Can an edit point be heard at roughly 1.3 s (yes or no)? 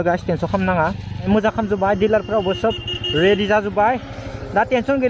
yes